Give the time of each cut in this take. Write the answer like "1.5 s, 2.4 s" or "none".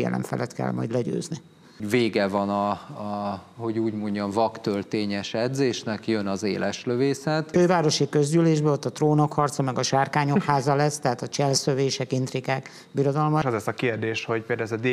1.8 s, 7.5 s, 13.4 s

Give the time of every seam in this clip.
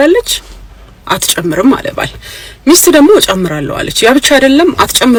none

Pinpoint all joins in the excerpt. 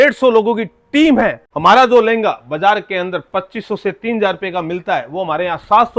1.5 s

